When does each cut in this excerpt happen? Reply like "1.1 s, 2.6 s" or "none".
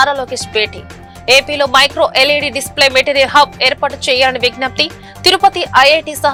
none